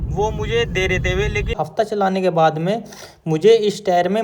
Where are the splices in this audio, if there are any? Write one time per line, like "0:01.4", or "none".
0:01.5

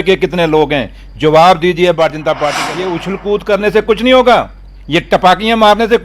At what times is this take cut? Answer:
0:02.6

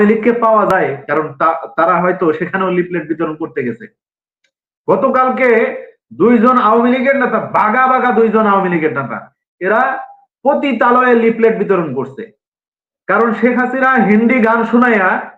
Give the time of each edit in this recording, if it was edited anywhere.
0:01.0

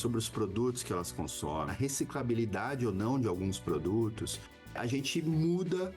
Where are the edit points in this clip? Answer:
0:01.7
0:04.7

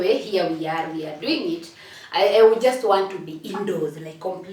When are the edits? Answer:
0:01.9

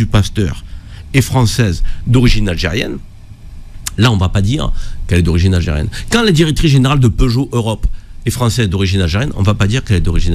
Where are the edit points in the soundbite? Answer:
none

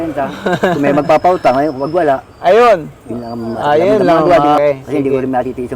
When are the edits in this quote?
0:04.6

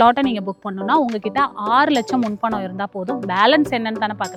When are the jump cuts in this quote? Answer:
none

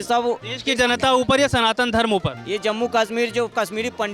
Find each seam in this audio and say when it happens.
0:02.4

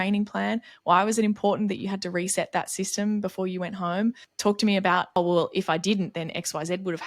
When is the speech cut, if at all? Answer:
0:04.3
0:05.2

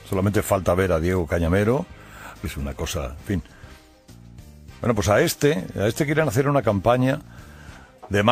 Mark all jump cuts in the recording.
none

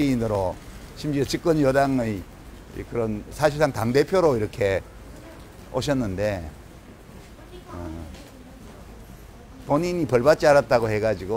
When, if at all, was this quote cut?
none

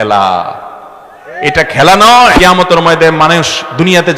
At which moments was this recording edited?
0:02.4

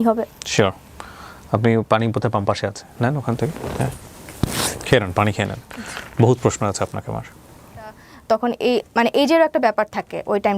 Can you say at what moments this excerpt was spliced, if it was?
0:08.1

